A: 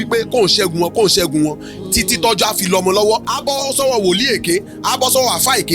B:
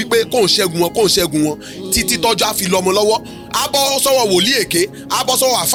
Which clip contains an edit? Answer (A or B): A